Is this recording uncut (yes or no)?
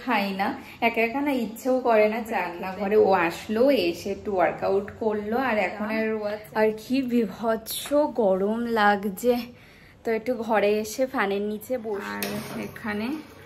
no